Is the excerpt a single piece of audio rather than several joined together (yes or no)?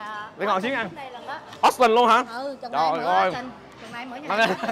yes